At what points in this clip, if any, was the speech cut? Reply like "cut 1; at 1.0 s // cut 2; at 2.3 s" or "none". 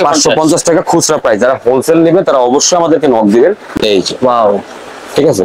cut 1; at 3.6 s